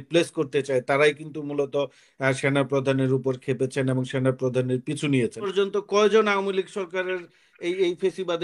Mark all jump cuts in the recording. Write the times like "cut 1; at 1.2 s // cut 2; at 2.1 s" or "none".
cut 1; at 5.5 s